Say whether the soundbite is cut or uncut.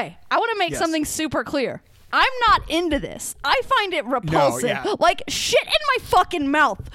uncut